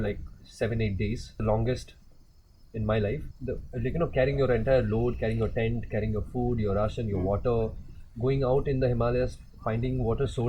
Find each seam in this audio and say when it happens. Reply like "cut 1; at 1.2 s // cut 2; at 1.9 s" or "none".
cut 1; at 1.4 s // cut 2; at 3.3 s